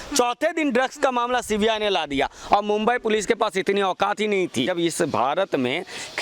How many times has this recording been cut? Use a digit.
1